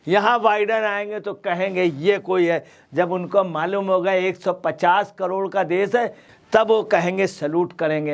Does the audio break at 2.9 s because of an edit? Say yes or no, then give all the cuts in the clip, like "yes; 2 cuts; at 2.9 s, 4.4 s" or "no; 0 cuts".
no; 1 cut; at 6.3 s